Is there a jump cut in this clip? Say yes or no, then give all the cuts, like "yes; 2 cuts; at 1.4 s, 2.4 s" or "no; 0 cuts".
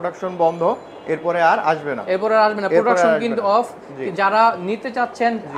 no; 0 cuts